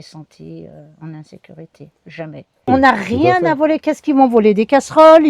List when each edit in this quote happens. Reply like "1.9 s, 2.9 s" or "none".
2.7 s